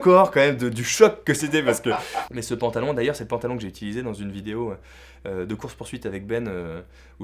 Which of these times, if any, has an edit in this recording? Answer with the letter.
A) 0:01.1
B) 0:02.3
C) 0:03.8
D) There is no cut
B